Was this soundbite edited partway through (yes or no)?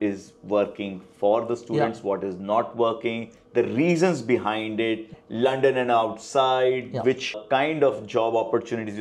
no